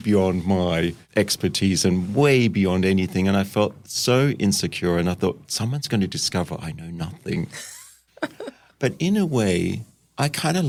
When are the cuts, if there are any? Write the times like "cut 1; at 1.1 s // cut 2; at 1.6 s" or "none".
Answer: none